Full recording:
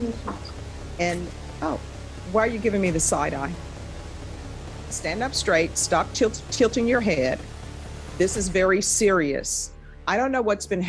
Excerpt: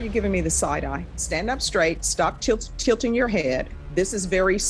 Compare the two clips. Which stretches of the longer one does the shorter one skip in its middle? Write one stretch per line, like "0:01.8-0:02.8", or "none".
0:03.6-0:04.9
0:07.5-0:08.0